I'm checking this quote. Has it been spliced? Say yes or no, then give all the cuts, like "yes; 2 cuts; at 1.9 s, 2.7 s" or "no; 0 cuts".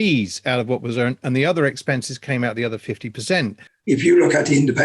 yes; 1 cut; at 3.7 s